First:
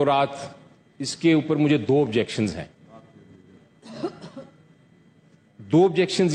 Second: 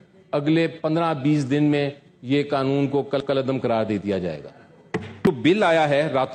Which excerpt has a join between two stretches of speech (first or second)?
second